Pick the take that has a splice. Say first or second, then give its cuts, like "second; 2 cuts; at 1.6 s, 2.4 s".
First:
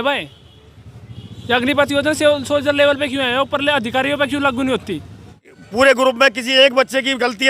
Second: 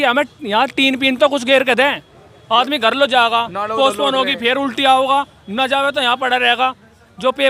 first; 1 cut; at 5.5 s